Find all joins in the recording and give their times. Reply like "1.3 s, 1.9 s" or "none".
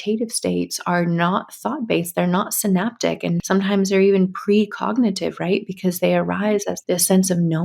3.4 s, 6.7 s